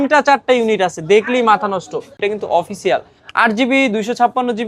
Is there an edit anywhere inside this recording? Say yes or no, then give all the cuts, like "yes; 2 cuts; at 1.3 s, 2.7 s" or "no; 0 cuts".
yes; 1 cut; at 2.2 s